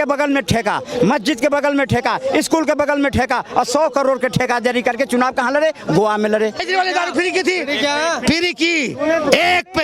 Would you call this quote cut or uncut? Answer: cut